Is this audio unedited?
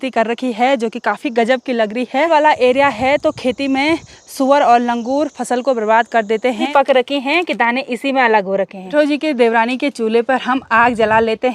no; 3 cuts; at 2.3 s, 6.7 s, 8.9 s

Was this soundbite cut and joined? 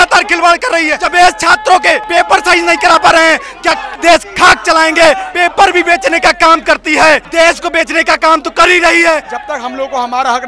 yes; 6 cuts; at 1.0 s, 2.0 s, 3.9 s, 5.3 s, 7.3 s, 9.4 s

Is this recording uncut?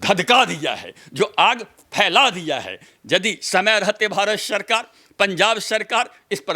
yes; 0 cuts

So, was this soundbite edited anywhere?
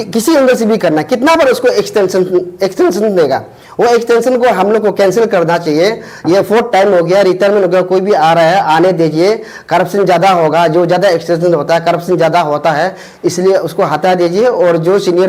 no; 0 cuts

